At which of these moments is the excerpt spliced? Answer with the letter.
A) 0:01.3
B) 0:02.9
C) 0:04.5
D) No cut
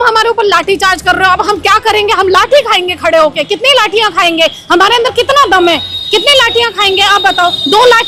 D